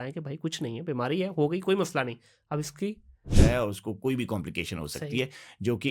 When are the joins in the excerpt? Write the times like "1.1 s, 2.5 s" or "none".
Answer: 3.2 s